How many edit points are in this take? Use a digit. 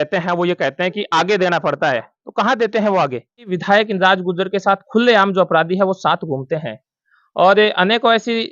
1